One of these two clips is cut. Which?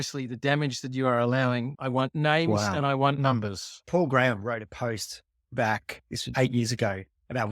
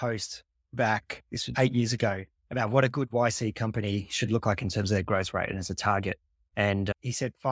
first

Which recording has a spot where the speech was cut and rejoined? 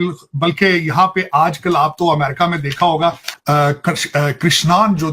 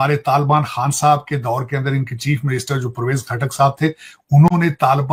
first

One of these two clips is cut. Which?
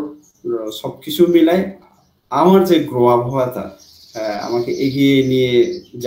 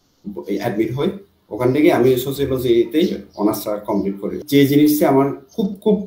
second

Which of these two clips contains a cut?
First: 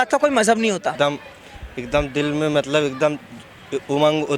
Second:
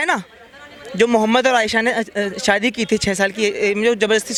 first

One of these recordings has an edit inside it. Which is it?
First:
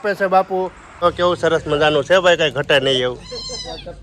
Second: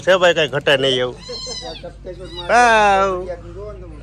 first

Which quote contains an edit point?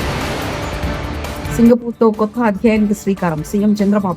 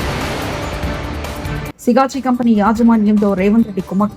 first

